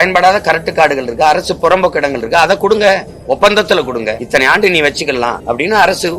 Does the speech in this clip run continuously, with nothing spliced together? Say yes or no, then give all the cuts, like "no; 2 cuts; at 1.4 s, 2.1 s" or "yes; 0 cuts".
no; 2 cuts; at 4.2 s, 5.4 s